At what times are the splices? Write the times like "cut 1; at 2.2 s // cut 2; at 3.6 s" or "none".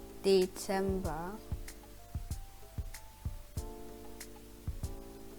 cut 1; at 1.4 s // cut 2; at 4.3 s